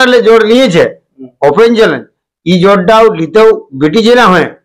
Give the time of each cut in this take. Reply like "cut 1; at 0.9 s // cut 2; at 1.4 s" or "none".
none